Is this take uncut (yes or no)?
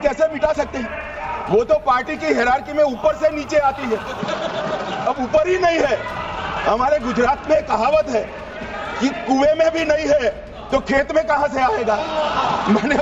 yes